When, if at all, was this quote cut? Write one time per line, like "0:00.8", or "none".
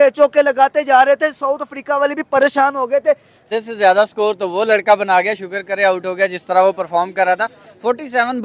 0:03.3